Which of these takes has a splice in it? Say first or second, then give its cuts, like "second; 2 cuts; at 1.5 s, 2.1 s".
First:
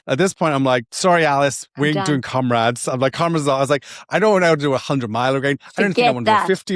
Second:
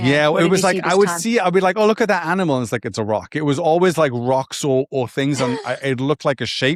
first; 1 cut; at 0.9 s